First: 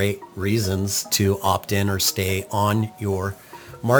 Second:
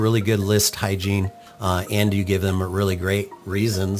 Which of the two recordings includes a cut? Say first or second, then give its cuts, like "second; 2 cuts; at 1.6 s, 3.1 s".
second; 1 cut; at 1.4 s